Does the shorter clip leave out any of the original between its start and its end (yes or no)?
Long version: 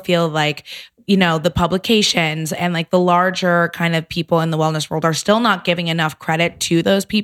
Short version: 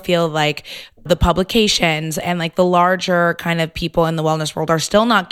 yes